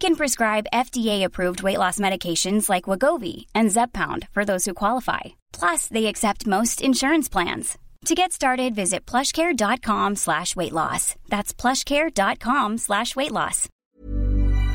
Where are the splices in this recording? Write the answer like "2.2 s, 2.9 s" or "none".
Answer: 13.7 s